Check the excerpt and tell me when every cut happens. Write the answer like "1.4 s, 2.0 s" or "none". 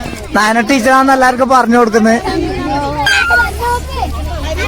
3.1 s

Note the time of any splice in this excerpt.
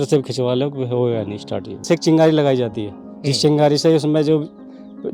1.8 s

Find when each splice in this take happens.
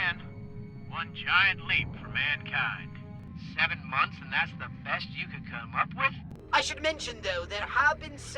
3.2 s, 6.1 s

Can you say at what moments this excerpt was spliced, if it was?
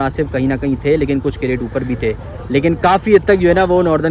none

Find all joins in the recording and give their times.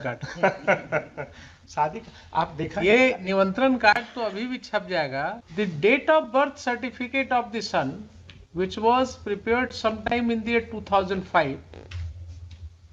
5.4 s

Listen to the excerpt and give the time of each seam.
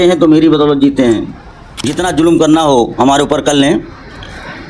1.9 s

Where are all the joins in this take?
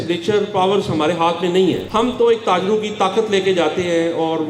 1.8 s

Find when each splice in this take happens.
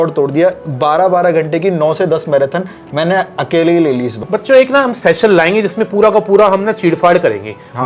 4.2 s

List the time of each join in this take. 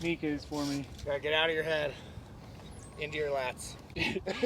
1.0 s

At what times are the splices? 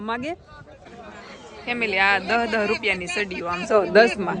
1.0 s

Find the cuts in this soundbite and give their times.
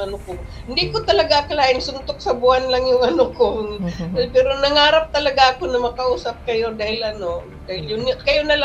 none

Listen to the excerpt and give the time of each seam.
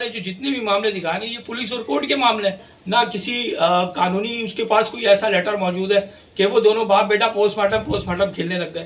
2.7 s

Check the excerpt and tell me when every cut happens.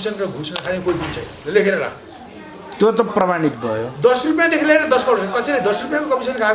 none

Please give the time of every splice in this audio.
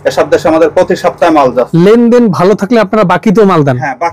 1.7 s

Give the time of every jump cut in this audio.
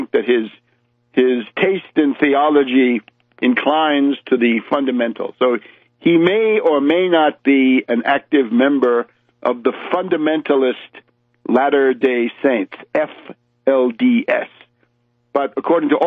8.4 s

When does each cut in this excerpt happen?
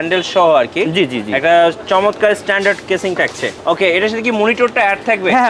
3.5 s

